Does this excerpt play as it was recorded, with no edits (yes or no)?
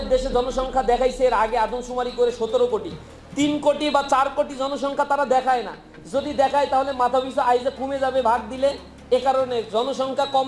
yes